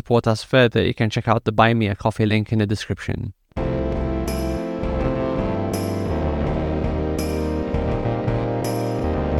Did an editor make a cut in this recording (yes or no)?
yes